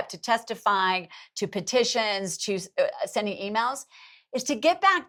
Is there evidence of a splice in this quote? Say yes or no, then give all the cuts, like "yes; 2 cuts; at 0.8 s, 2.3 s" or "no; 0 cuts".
no; 0 cuts